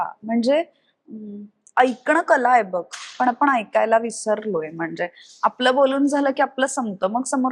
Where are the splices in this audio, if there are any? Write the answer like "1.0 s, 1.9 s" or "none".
none